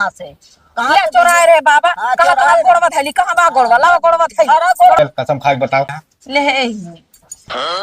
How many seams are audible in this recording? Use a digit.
1